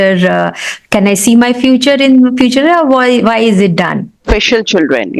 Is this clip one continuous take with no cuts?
no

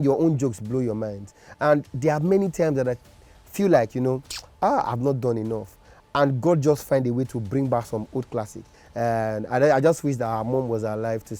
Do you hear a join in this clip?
yes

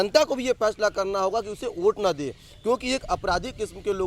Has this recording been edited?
no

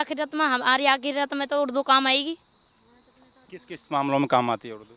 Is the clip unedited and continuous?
yes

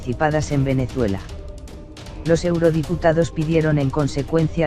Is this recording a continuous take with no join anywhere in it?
yes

